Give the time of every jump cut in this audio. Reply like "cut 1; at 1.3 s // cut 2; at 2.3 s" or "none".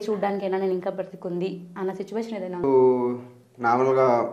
cut 1; at 2.6 s